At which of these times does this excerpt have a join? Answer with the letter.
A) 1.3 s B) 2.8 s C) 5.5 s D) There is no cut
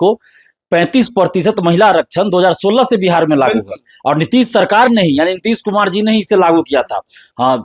D